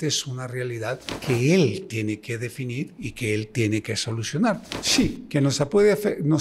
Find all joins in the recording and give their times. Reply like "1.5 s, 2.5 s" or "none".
1.1 s, 4.7 s